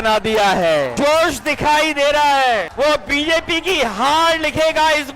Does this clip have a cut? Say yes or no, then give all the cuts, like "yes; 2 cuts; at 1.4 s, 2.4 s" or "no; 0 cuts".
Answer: yes; 2 cuts; at 0.9 s, 2.7 s